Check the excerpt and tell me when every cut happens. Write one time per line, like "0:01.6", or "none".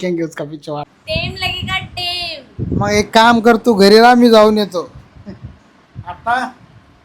0:00.9